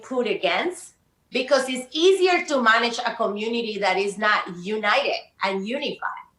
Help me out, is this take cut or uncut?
uncut